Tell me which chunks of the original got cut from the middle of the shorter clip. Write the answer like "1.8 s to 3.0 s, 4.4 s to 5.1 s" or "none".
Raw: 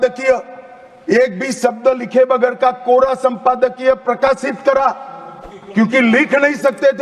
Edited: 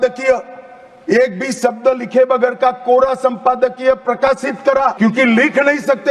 4.9 s to 5.7 s